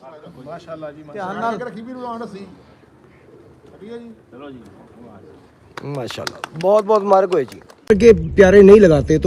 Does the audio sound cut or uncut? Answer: cut